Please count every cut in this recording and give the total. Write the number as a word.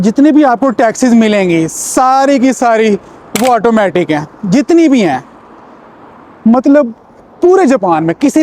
zero